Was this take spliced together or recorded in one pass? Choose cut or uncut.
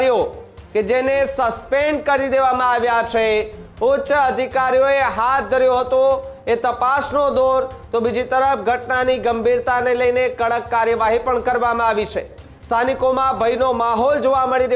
uncut